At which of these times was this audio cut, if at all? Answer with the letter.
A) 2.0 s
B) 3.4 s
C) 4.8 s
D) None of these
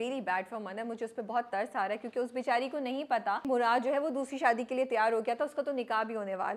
B